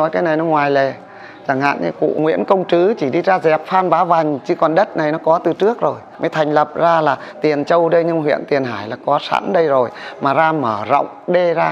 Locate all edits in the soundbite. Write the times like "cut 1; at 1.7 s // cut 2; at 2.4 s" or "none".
cut 1; at 2.2 s // cut 2; at 6.1 s